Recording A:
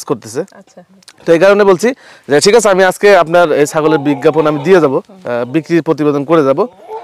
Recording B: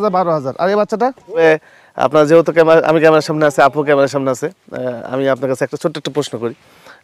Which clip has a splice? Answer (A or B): B